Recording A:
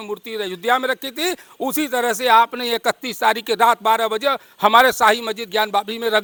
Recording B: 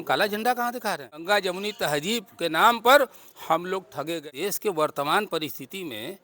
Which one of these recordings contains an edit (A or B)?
B